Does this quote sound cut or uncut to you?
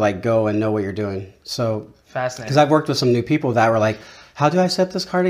uncut